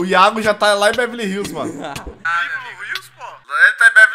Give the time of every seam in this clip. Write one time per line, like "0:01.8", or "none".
none

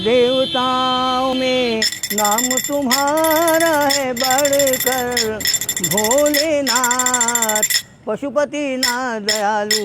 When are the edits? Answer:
0:01.3

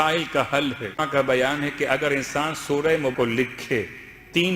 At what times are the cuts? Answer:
0:01.0
0:03.1

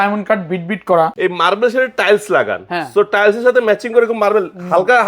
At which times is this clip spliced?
0:01.1

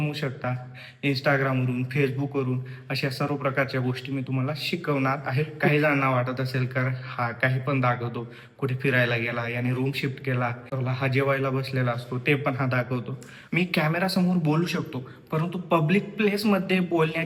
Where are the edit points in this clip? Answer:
0:05.7
0:10.7
0:13.3

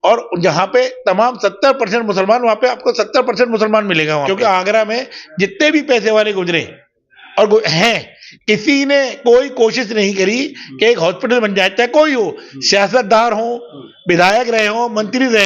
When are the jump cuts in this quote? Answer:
0:04.7

